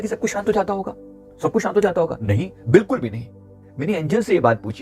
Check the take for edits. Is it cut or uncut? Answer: uncut